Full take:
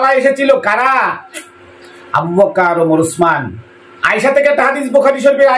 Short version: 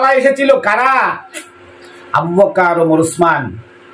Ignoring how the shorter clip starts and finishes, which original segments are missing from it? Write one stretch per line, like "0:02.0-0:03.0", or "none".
none

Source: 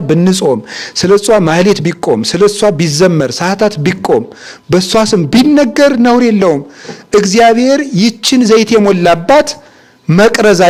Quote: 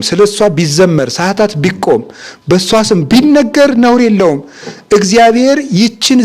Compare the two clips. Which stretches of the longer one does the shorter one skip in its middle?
none

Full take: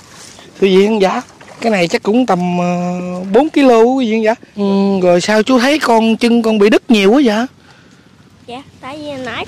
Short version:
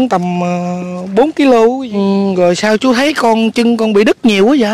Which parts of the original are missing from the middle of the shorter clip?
0:04.0-0:04.5

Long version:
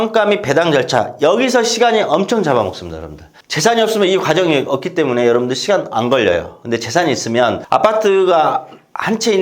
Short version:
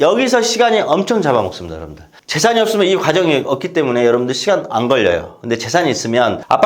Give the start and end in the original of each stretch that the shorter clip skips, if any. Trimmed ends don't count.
none

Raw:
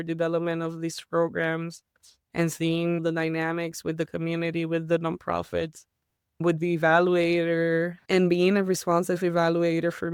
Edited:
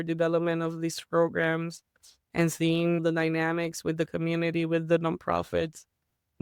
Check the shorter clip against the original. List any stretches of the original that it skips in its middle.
none

